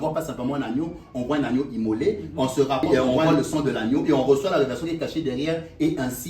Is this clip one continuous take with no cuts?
no; 1 cut; at 2.9 s

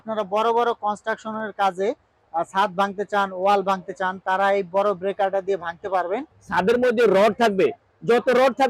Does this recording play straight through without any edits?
no; 1 cut; at 6.2 s

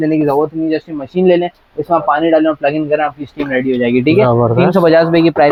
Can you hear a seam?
no; 0 cuts

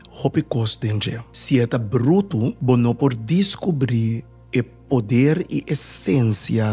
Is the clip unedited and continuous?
no; 2 cuts; at 1.3 s, 2.6 s

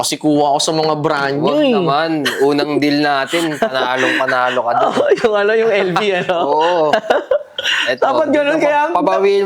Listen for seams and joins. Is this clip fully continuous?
yes; 0 cuts

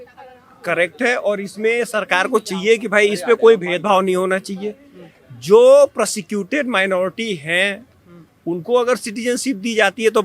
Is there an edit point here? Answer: no; 0 cuts

